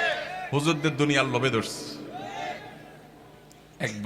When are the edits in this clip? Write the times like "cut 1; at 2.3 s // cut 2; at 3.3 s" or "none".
none

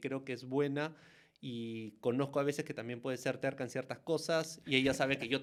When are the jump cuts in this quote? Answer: none

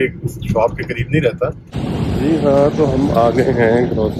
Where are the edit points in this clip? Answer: cut 1; at 1.9 s

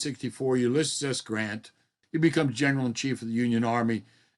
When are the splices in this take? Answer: cut 1; at 1.9 s

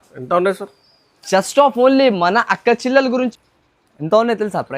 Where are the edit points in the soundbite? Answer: cut 1; at 3.2 s

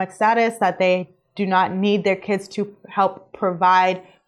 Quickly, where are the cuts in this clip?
none

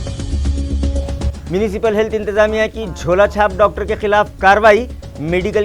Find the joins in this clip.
cut 1; at 1.0 s

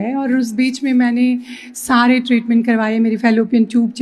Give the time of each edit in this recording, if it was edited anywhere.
none

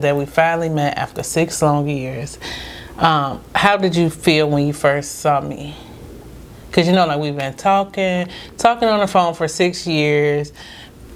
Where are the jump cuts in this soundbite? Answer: none

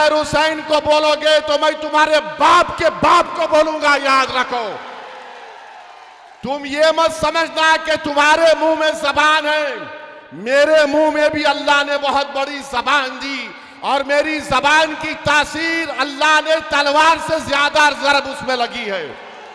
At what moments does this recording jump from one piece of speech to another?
none

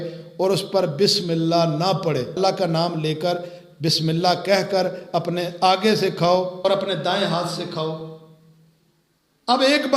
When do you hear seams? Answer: cut 1; at 2.4 s // cut 2; at 6.6 s

